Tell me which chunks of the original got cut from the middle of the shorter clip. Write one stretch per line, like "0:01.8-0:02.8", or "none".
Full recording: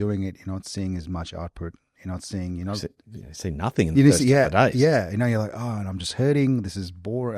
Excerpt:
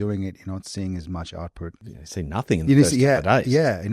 0:01.9-0:03.1

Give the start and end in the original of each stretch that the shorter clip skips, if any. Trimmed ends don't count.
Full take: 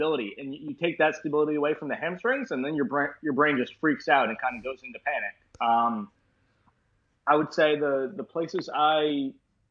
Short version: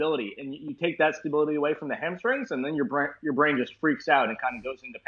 none

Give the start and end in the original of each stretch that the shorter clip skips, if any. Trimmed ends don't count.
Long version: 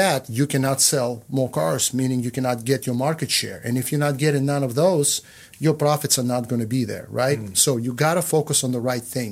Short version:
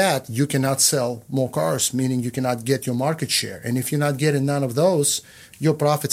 none

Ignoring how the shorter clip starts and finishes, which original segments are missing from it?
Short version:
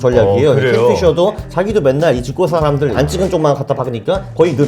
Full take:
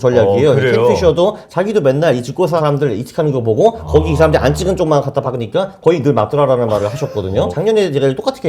0:03.0-0:04.4

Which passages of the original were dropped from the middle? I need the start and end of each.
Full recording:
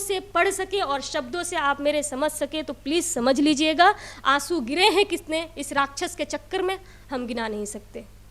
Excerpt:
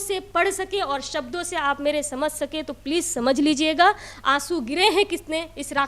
none

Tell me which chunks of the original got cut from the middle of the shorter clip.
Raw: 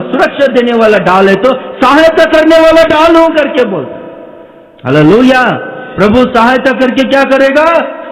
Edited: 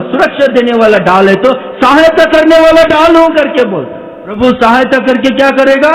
0:04.3-0:06.0

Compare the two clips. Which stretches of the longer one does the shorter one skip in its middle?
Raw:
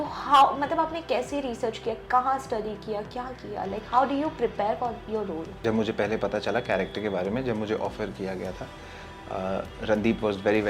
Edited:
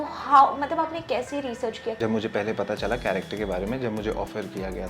0:02.0-0:05.6

